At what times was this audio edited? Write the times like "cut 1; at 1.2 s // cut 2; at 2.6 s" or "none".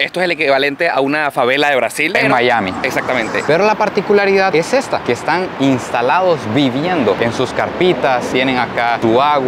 cut 1; at 3.4 s